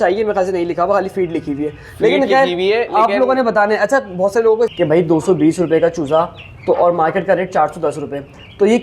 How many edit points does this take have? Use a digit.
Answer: 1